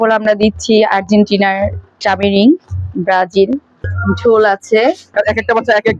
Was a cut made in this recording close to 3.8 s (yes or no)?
yes